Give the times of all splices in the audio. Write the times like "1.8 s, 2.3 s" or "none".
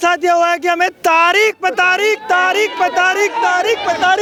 none